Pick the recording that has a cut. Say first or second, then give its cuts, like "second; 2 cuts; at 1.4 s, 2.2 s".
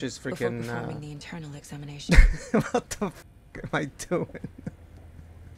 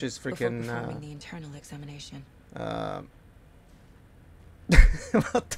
first; 1 cut; at 2.0 s